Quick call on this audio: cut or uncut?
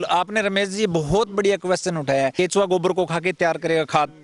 cut